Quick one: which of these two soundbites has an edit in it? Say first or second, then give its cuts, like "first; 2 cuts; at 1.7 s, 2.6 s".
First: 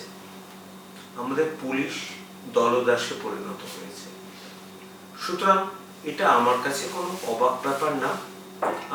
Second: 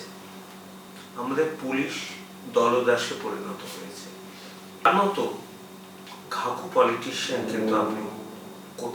second; 1 cut; at 4.9 s